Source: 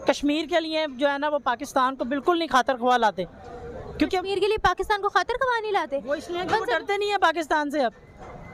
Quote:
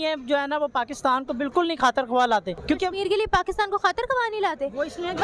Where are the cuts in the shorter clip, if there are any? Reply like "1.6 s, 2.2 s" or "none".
2.5 s